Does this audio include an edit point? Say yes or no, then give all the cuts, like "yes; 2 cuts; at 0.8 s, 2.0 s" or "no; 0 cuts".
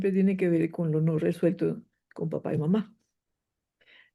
no; 0 cuts